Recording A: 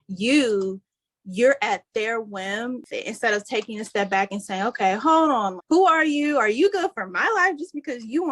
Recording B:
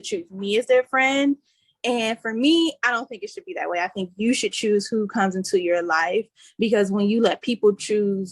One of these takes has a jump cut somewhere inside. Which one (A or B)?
A